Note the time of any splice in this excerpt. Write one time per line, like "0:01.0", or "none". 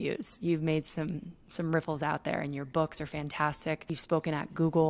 0:03.9